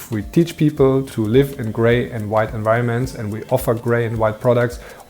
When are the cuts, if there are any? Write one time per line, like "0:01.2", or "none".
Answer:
0:01.1